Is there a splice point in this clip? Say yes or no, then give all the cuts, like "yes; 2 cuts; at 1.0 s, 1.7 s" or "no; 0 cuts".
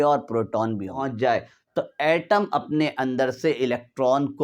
yes; 1 cut; at 1.1 s